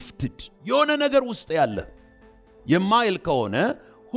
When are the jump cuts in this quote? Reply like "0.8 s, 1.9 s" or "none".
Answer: none